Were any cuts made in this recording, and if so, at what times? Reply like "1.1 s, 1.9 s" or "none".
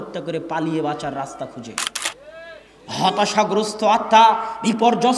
none